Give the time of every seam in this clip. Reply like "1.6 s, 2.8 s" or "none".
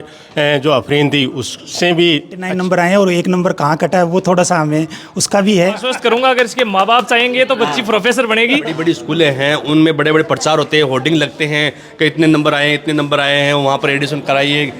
2.4 s, 5.9 s, 8.8 s